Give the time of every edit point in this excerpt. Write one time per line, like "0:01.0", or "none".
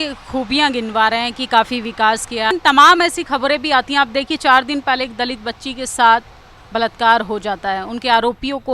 0:02.5